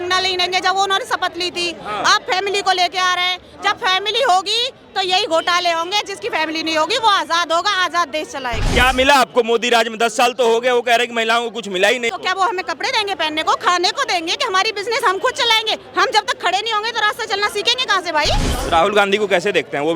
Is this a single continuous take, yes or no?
no